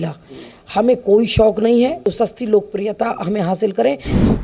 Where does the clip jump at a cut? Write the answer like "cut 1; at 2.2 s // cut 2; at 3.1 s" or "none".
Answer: cut 1; at 2.0 s